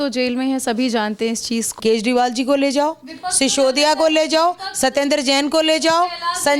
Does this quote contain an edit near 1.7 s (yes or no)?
yes